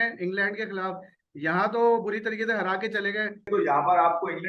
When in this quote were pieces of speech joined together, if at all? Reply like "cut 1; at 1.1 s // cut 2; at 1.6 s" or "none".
cut 1; at 3.4 s